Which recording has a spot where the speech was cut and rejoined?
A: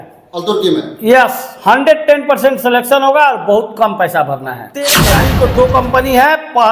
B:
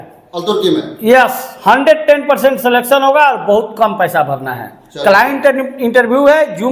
A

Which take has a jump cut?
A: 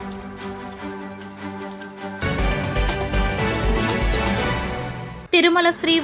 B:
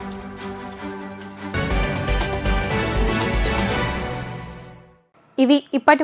A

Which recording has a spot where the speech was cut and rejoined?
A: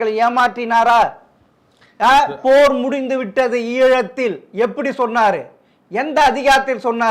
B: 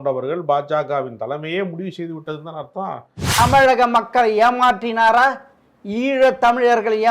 B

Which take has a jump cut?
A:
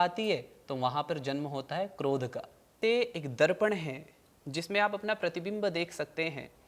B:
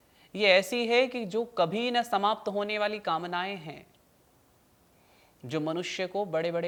A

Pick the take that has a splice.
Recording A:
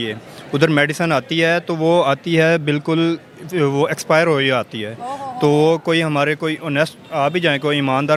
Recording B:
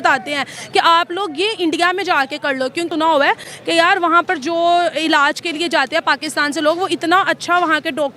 B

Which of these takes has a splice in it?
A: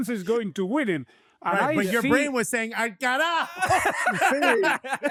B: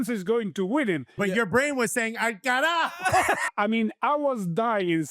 B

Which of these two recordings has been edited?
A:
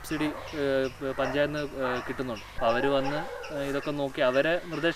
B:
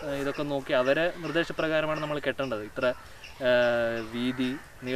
A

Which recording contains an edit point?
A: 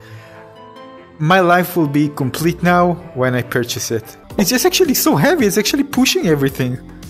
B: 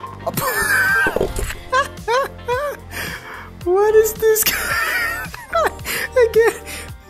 A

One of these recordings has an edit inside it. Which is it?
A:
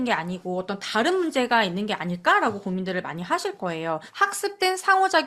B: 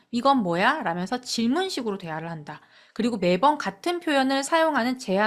A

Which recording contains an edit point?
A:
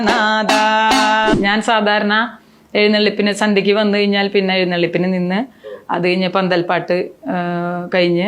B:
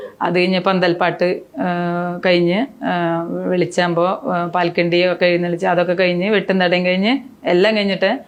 A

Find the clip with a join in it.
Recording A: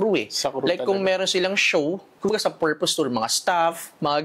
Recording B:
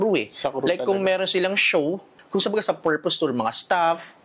A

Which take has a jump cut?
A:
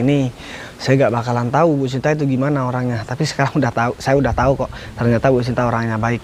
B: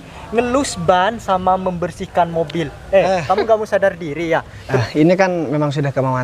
B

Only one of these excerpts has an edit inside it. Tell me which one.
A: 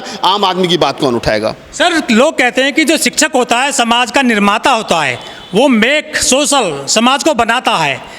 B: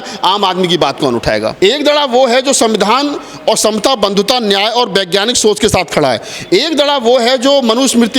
B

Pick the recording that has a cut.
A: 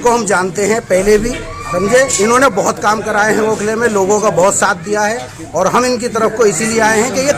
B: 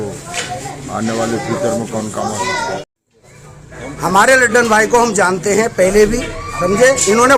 B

